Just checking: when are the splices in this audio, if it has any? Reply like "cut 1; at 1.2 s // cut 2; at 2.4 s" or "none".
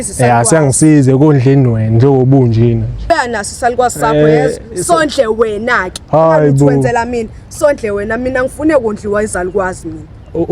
cut 1; at 3.0 s